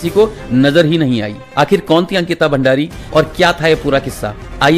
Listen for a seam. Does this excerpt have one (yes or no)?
yes